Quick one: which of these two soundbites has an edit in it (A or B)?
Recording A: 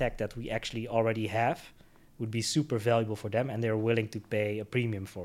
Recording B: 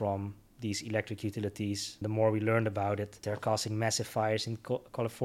B